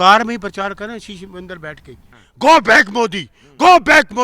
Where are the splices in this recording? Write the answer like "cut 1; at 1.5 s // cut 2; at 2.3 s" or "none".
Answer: cut 1; at 2.3 s